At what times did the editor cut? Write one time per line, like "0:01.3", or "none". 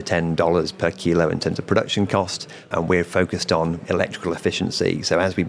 0:02.7
0:03.8